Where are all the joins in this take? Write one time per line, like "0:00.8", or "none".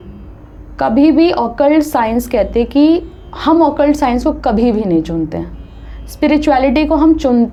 none

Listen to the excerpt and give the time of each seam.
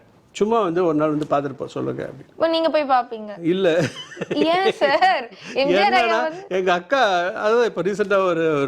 none

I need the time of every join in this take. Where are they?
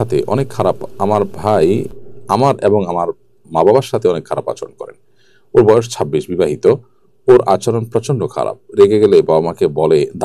none

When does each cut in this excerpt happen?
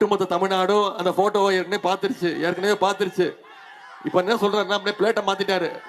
none

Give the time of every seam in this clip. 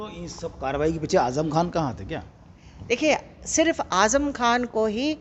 none

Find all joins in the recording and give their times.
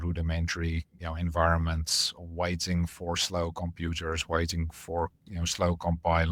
none

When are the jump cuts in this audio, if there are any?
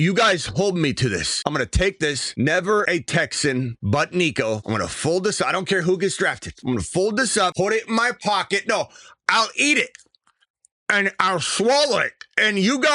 0:01.3
0:02.2
0:02.9
0:03.8
0:04.6
0:06.5
0:07.5

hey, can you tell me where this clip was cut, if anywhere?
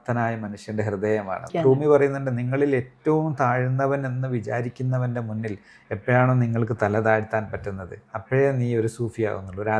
0:01.5

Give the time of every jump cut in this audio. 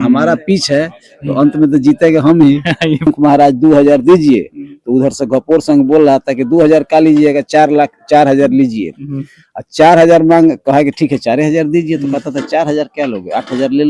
0:03.1

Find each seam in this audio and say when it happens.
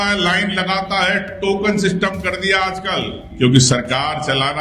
0:03.3

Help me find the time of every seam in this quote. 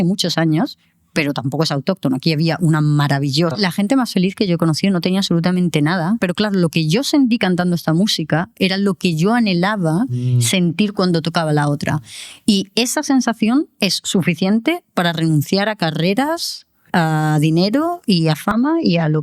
0:03.5
0:06.2

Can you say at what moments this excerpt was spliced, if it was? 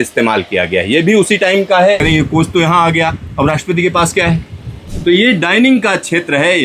0:02.0
0:04.8

